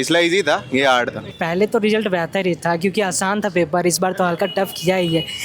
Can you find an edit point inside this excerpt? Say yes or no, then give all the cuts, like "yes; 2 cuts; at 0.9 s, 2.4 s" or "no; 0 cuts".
yes; 1 cut; at 1.2 s